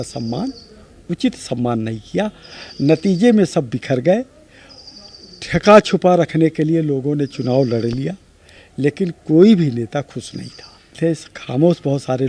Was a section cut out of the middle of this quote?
yes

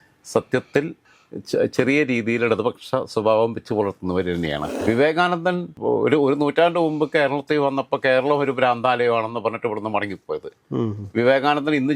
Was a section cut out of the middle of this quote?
yes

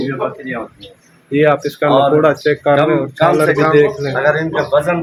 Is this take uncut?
yes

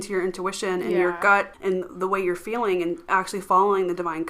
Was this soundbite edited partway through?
yes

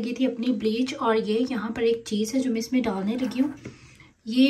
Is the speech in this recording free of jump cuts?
yes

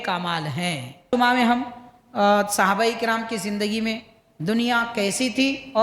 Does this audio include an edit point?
yes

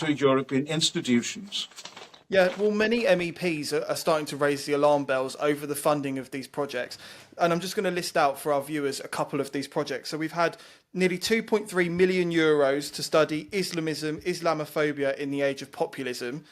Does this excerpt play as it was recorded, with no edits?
yes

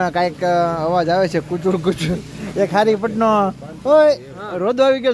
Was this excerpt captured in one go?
yes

